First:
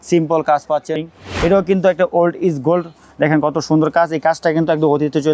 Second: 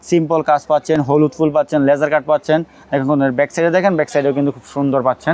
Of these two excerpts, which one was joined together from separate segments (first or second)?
first